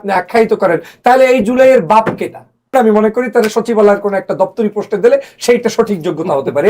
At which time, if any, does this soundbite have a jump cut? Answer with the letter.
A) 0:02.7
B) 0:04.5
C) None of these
A